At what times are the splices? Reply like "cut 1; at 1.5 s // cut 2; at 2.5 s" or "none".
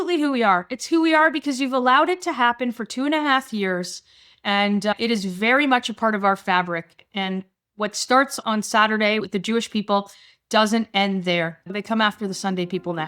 cut 1; at 8.4 s // cut 2; at 11.7 s